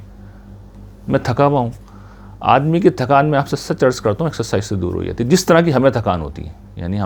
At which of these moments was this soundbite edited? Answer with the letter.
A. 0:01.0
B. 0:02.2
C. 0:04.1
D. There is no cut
D